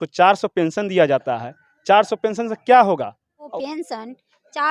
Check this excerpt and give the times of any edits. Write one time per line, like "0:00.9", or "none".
0:03.2